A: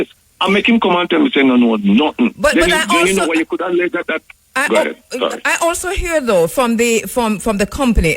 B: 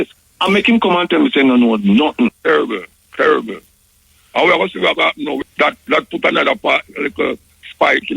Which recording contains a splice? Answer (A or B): B